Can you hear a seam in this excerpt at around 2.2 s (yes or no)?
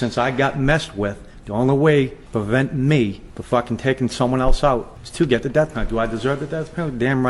yes